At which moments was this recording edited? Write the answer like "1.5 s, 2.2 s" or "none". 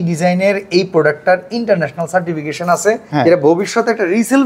3.0 s